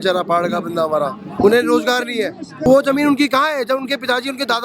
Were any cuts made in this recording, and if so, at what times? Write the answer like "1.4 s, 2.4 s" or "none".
2.7 s